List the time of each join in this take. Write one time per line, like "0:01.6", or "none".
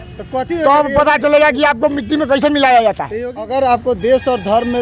0:03.4